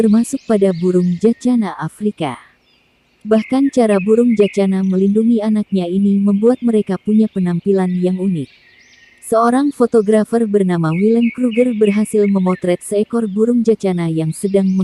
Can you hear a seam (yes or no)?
no